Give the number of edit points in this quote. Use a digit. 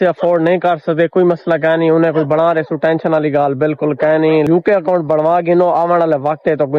1